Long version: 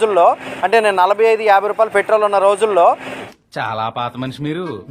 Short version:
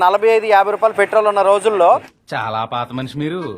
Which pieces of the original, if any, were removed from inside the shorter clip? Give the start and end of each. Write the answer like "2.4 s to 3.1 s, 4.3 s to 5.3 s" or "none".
3.1 s to 3.4 s